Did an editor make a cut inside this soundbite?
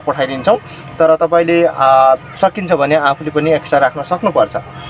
no; 0 cuts

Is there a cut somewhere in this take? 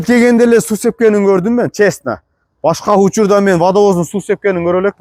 no; 0 cuts

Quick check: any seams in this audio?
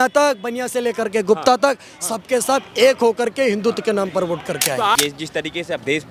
yes; 1 cut; at 5.0 s

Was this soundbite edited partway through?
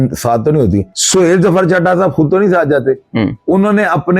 yes; 1 cut; at 1.0 s

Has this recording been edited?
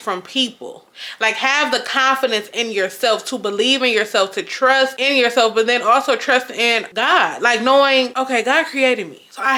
no; 0 cuts

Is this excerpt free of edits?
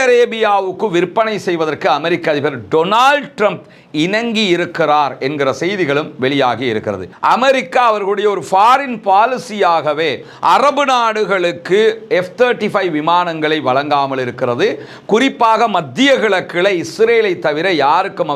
no; 1 cut; at 7.2 s

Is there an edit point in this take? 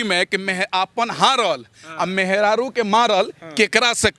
no; 0 cuts

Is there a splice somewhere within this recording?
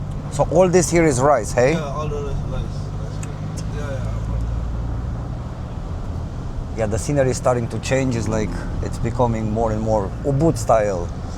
yes; 1 cut; at 3.6 s

